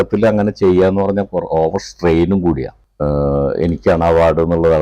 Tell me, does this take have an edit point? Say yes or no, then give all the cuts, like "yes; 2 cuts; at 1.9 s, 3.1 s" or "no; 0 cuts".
yes; 1 cut; at 2.7 s